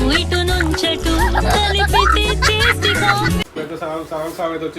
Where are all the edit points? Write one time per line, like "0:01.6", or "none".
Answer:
0:03.5